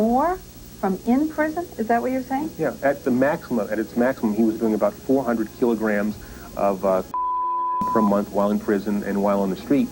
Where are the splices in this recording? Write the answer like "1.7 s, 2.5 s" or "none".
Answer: none